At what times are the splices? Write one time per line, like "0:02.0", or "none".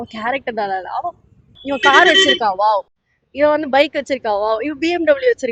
0:01.6